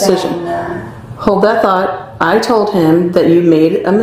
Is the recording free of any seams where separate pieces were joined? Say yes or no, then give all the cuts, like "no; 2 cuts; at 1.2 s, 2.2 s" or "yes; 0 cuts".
yes; 0 cuts